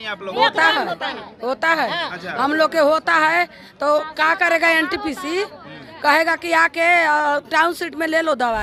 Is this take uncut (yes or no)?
yes